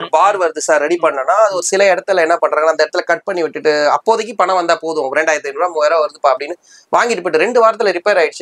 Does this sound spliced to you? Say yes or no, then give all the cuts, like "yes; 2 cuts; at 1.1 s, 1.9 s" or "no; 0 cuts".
no; 0 cuts